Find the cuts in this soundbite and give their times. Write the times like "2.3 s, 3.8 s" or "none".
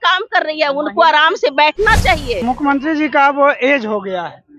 2.4 s